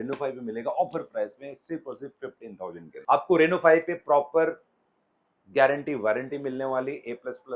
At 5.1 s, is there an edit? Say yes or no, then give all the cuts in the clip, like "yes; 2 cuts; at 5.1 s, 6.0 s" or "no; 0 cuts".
no; 1 cut; at 2.9 s